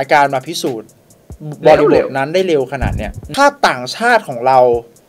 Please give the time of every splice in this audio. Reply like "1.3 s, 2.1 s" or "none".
3.2 s